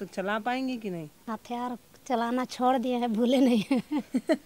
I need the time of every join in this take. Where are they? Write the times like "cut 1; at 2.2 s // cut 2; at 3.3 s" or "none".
cut 1; at 1.1 s